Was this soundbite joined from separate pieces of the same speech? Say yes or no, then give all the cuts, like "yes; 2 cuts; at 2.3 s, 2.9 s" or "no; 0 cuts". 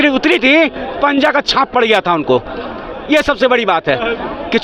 no; 0 cuts